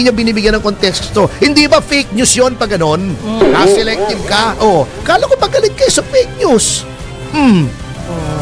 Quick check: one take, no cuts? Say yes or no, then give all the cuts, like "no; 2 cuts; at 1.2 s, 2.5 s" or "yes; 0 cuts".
yes; 0 cuts